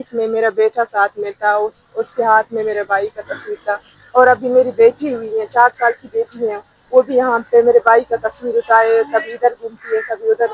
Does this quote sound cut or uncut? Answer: uncut